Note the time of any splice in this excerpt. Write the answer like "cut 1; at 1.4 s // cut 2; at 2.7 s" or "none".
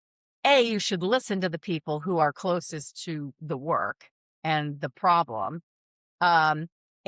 none